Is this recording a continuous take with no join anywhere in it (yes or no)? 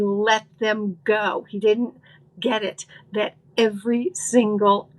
no